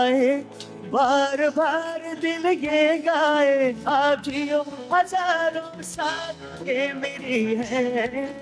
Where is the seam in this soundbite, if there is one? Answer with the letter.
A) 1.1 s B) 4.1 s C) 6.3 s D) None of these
D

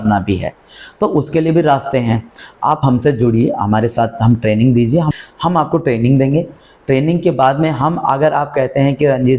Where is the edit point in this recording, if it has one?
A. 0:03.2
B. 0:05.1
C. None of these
B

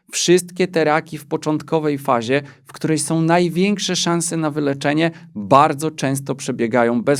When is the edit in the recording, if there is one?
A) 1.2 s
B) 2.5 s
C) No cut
C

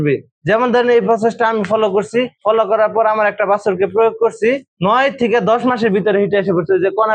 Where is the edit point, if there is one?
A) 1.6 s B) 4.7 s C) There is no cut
B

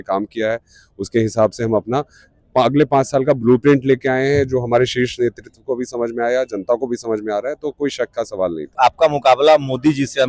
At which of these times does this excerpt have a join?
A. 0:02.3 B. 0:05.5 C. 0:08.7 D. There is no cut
C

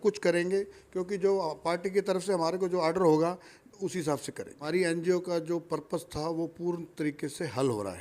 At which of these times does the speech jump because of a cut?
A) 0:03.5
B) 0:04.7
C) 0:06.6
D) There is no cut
B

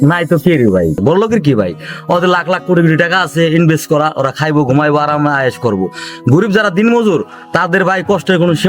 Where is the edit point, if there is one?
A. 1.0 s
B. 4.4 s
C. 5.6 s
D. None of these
A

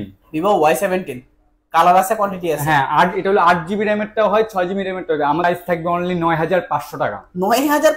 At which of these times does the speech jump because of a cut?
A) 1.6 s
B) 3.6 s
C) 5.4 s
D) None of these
C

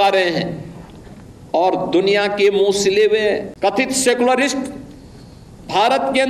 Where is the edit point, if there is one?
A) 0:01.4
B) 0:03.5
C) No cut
B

